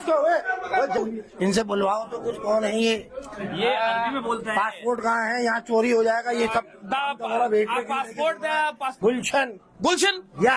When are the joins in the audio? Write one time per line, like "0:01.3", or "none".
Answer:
0:01.0
0:08.9